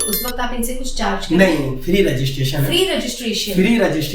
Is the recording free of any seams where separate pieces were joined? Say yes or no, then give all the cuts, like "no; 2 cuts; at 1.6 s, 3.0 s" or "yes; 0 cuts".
yes; 0 cuts